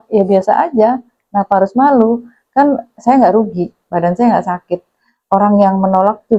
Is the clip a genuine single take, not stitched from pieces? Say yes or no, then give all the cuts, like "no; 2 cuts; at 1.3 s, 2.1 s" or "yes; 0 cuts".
yes; 0 cuts